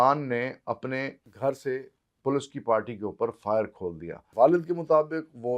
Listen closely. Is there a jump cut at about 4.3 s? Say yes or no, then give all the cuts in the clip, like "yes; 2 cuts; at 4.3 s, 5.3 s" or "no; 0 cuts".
yes; 2 cuts; at 1.2 s, 4.3 s